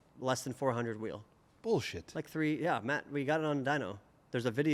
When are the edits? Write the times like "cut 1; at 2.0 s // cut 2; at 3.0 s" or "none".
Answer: none